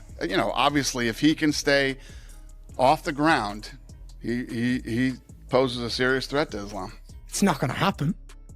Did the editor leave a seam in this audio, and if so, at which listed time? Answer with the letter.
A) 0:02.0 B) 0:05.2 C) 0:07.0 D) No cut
C